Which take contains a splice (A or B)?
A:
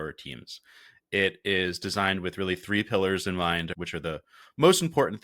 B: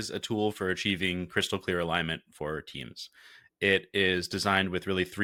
A